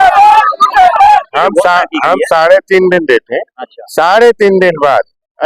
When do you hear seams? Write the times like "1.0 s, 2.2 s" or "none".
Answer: 1.3 s